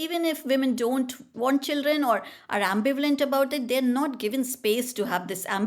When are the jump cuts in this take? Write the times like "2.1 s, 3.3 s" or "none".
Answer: 1.3 s